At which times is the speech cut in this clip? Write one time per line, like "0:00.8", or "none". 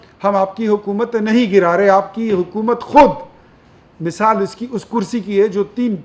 none